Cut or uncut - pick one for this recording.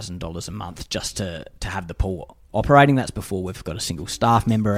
uncut